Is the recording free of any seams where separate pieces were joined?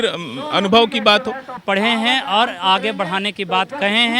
no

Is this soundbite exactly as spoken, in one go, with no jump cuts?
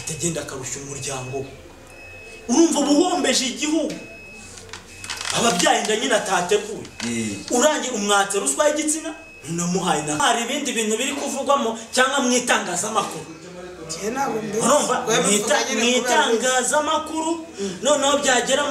no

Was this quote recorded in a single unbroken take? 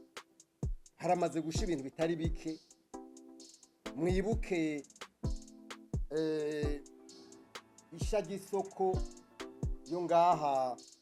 yes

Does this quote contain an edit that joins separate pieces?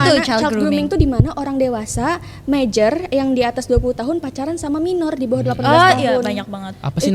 no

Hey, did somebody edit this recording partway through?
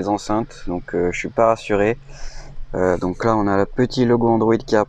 no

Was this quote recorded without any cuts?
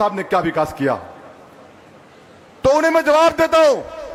yes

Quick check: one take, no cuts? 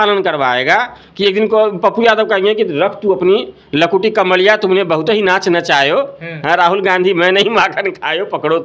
yes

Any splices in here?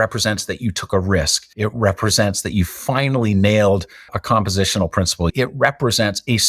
yes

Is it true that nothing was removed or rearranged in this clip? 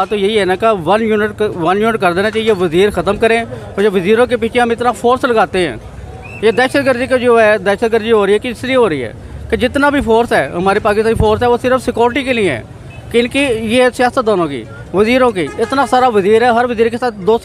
yes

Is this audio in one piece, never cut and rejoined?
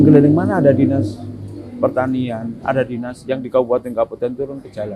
yes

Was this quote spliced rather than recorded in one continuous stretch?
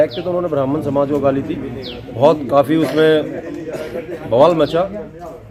no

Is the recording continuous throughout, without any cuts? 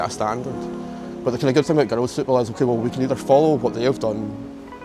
yes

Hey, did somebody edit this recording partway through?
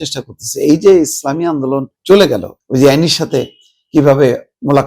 yes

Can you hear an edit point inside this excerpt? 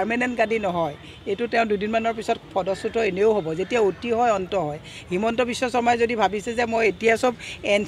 no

